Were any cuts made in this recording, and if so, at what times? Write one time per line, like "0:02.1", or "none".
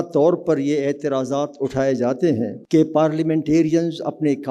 0:02.6